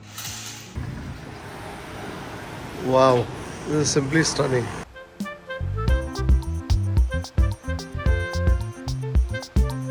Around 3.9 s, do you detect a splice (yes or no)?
no